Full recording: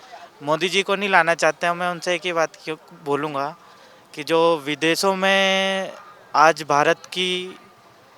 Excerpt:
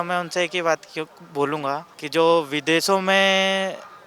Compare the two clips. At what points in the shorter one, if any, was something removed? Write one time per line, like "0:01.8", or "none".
0:01.9